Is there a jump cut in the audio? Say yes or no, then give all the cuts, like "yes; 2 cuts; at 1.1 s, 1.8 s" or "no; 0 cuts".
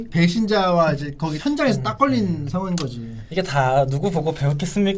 no; 0 cuts